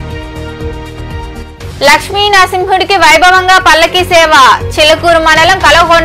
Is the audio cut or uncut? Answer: uncut